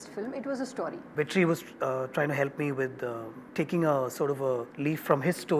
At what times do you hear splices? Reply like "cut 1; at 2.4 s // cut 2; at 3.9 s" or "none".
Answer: cut 1; at 1.1 s // cut 2; at 3.3 s // cut 3; at 4.7 s